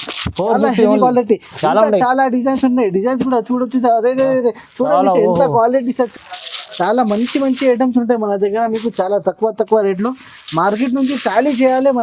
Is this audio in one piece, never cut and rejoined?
no; 1 cut; at 6.1 s

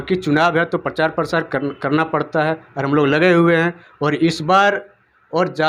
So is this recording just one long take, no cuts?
yes; 0 cuts

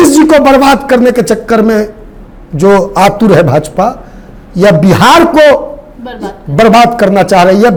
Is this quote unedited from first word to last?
yes; 0 cuts

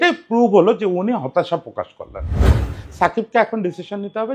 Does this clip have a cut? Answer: yes; 1 cut; at 2.5 s

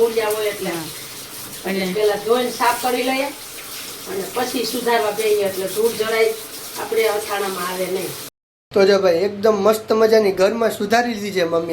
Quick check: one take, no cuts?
no; 1 cut; at 8.2 s

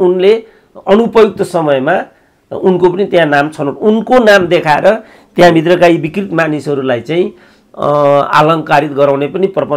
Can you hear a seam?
no; 0 cuts

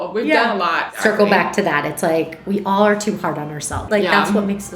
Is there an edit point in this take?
yes; 2 cuts; at 0.9 s, 3.9 s

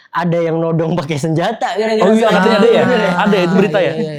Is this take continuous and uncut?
yes; 0 cuts

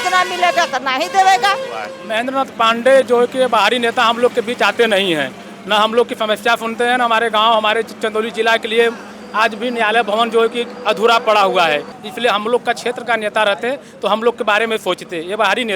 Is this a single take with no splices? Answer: no; 2 cuts; at 2.0 s, 12.0 s

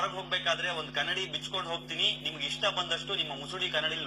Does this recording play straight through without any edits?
yes; 0 cuts

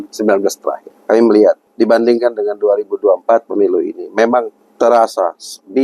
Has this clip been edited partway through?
yes; 3 cuts; at 0.9 s, 1.7 s, 4.6 s

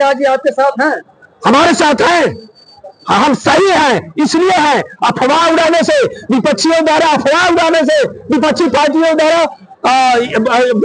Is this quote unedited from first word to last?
yes; 0 cuts

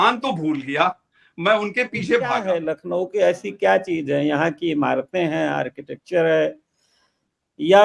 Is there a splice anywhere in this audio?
yes; 1 cut; at 2.7 s

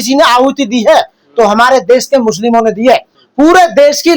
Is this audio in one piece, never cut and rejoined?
no; 1 cut; at 3.1 s

